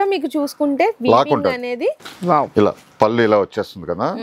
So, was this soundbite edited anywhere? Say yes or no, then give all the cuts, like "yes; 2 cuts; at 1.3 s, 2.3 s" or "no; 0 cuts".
yes; 1 cut; at 2.1 s